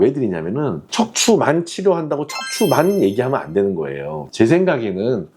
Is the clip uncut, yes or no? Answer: yes